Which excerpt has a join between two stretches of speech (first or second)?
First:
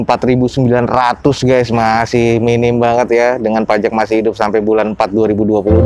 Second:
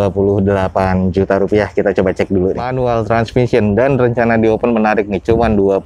second